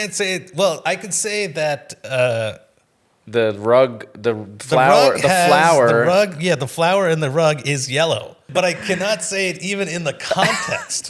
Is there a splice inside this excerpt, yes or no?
yes